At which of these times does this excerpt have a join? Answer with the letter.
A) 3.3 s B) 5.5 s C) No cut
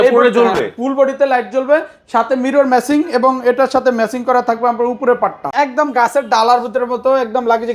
B